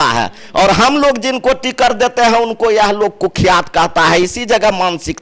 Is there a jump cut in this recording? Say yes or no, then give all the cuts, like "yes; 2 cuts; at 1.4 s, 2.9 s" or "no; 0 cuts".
no; 0 cuts